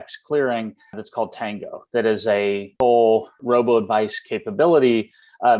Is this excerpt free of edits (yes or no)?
no